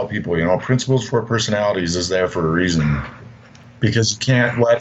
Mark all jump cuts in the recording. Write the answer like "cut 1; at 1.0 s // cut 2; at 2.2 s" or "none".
cut 1; at 3.8 s

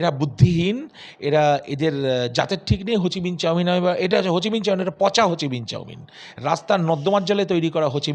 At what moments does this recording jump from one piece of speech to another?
none

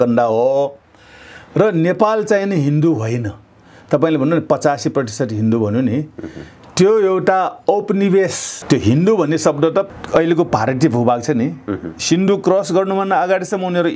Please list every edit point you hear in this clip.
cut 1; at 8.5 s // cut 2; at 9.9 s

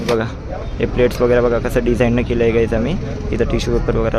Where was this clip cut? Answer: none

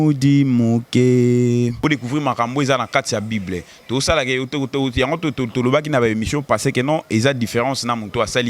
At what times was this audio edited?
cut 1; at 1.8 s

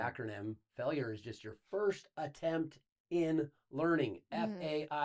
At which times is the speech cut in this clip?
none

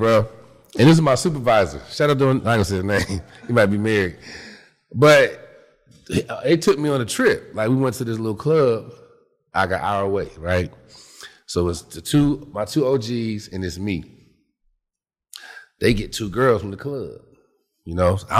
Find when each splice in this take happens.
none

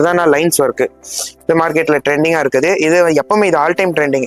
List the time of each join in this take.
none

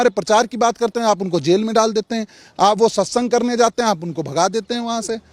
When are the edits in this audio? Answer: none

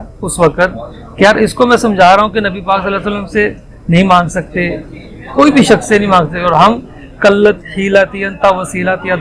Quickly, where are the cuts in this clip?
none

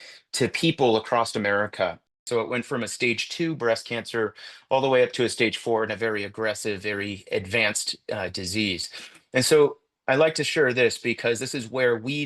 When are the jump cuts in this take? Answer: cut 1; at 2.1 s

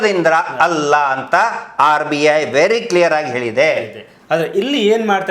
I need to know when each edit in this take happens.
none

